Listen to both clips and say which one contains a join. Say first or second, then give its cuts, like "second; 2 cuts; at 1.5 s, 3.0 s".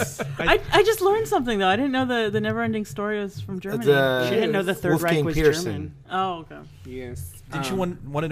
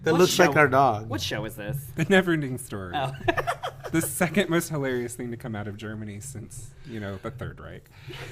second; 1 cut; at 4.4 s